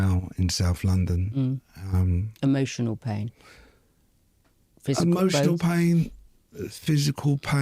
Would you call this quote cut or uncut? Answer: uncut